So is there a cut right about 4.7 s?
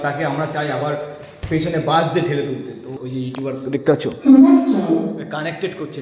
no; 1 cut; at 3.0 s

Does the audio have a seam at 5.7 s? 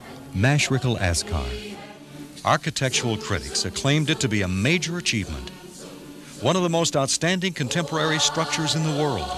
no; 1 cut; at 2.0 s

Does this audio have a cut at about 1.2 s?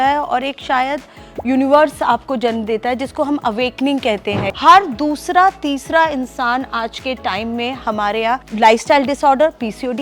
no; 2 cuts; at 4.5 s, 8.5 s

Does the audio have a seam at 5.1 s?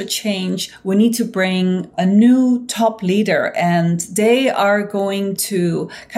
no; 1 cut; at 1.9 s

